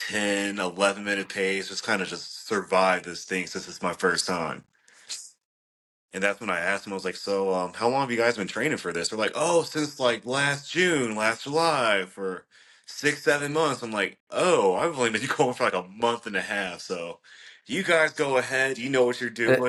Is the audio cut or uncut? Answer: uncut